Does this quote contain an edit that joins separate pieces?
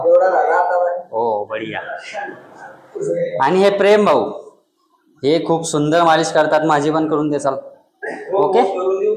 no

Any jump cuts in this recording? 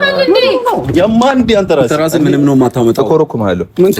yes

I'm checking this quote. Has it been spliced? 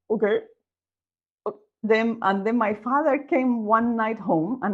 yes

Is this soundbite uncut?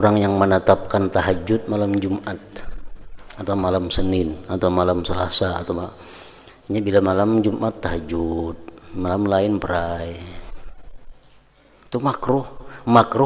yes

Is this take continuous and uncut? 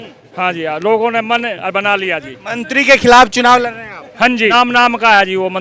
no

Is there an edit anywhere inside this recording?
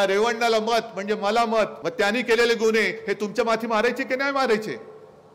yes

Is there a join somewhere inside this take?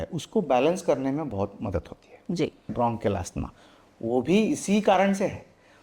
yes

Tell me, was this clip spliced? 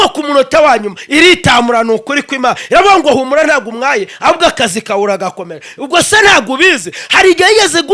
no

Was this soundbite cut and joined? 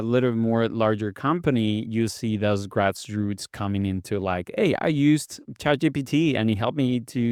no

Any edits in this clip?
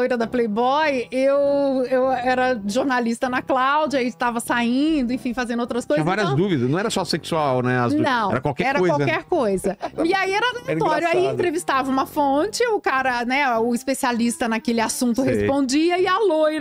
no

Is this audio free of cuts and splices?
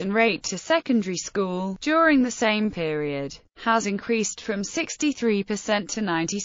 no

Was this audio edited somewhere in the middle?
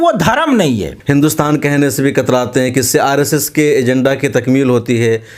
yes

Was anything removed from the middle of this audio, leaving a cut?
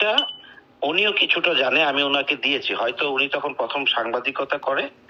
no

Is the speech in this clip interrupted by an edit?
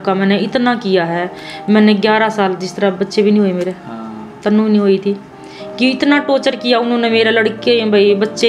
no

